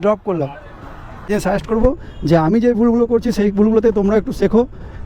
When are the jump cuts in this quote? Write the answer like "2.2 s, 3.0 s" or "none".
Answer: 1.3 s